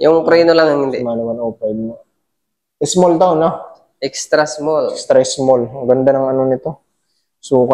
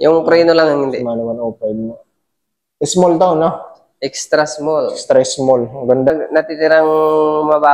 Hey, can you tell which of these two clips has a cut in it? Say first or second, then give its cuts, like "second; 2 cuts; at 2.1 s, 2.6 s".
second; 1 cut; at 6.1 s